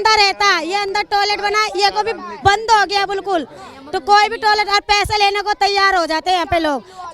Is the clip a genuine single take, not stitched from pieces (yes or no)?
yes